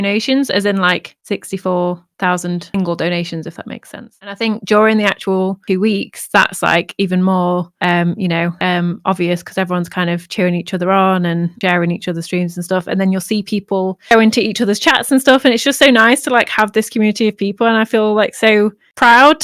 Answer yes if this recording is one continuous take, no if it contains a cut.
no